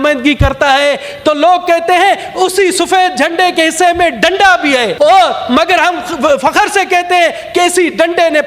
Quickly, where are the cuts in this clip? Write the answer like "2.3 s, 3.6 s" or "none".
4.9 s